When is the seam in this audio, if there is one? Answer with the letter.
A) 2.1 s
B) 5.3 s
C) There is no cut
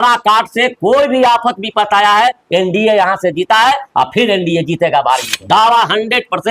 B